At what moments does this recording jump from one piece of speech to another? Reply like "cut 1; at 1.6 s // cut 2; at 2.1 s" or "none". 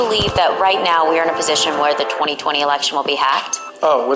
none